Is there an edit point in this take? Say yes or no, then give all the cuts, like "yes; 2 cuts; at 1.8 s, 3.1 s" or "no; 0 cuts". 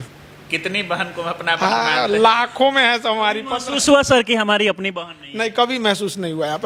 no; 0 cuts